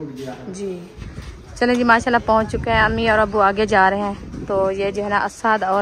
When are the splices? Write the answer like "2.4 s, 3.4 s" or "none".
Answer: 0.9 s